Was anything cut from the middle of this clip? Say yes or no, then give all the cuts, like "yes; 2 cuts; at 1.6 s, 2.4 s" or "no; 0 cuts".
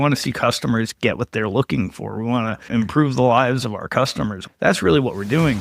yes; 2 cuts; at 2.6 s, 4.5 s